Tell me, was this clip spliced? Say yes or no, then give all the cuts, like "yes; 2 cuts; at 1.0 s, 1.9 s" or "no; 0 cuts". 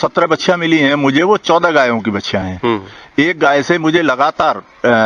no; 0 cuts